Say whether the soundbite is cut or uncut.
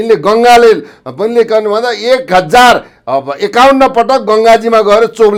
uncut